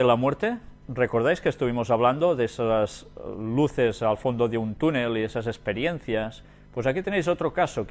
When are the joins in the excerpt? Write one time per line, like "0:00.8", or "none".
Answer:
0:03.5